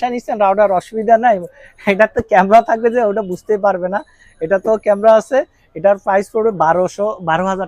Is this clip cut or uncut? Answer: uncut